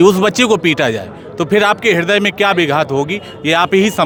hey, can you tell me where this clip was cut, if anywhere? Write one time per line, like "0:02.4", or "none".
none

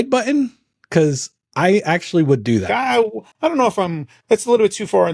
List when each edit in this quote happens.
0:02.7

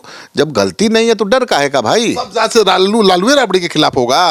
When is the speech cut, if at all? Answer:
none

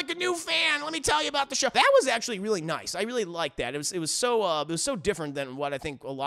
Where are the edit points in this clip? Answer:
0:01.7

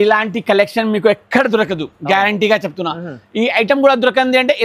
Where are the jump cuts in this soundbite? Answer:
none

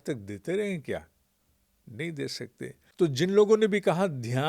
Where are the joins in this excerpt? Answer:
0:02.8

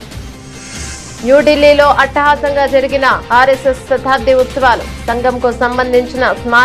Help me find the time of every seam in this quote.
0:01.2

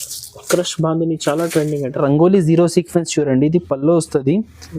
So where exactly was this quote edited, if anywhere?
0:02.0

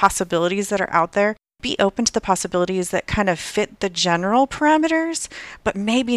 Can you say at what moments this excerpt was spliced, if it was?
0:01.5

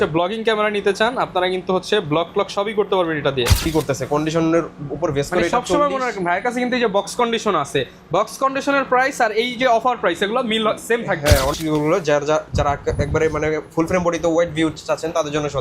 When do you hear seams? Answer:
0:03.7
0:11.6

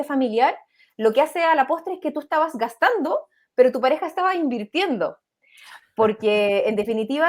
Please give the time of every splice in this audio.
none

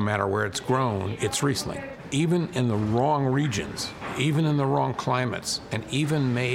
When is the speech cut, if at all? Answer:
0:01.1
0:02.0

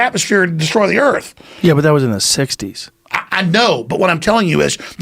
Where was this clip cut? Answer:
none

